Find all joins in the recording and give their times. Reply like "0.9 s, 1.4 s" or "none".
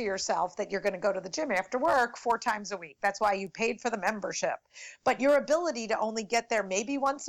none